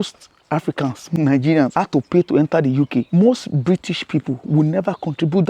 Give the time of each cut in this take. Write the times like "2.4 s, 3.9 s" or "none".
1.0 s, 1.7 s, 3.1 s